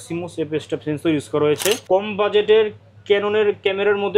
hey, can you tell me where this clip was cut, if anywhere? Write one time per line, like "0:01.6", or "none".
0:01.8